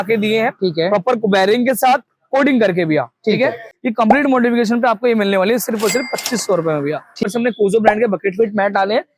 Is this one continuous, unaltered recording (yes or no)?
no